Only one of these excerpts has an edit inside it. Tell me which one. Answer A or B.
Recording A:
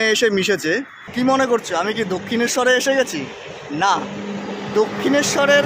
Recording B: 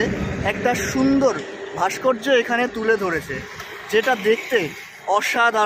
A